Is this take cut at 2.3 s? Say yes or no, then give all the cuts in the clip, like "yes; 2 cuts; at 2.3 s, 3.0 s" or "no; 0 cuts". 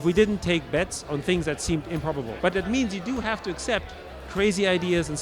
yes; 1 cut; at 2.3 s